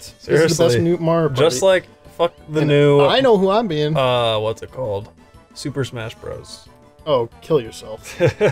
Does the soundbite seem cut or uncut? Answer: cut